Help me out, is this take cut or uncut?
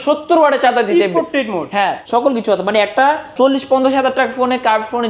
cut